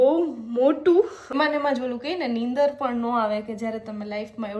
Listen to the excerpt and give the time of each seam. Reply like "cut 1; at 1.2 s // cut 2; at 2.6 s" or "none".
cut 1; at 1.3 s